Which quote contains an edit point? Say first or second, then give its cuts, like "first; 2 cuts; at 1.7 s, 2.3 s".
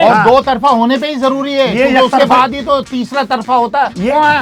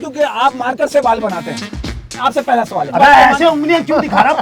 second; 2 cuts; at 1.8 s, 2.9 s